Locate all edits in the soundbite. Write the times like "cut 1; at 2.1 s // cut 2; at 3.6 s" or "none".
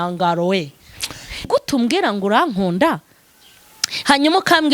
cut 1; at 1.4 s